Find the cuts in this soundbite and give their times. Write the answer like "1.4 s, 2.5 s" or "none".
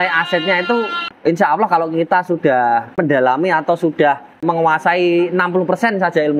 1.0 s, 3.0 s, 4.4 s

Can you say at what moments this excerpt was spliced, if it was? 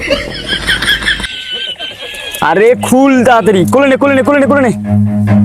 none

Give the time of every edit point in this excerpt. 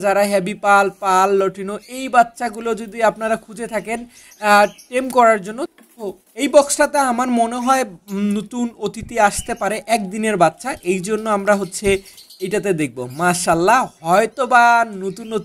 5.6 s

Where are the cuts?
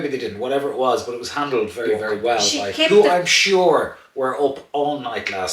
2.9 s

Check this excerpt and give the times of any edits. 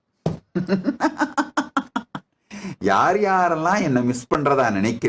none

